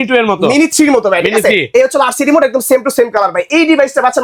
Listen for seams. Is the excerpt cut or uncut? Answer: uncut